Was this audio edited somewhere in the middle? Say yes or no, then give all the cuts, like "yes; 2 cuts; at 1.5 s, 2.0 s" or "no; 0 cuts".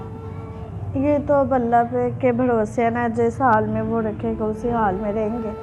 no; 0 cuts